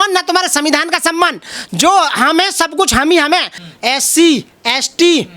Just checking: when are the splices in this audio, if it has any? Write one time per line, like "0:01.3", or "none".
0:03.6